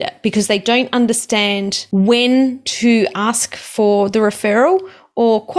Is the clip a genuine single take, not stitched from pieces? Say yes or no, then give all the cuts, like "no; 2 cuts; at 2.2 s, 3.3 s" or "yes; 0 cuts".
no; 1 cut; at 1.8 s